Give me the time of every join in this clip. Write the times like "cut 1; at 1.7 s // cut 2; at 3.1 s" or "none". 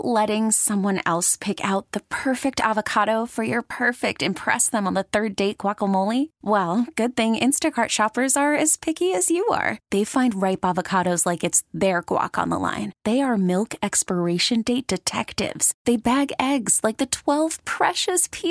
none